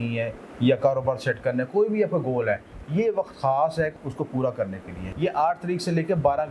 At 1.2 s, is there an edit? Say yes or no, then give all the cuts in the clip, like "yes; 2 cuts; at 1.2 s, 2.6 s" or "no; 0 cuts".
no; 2 cuts; at 4.0 s, 5.0 s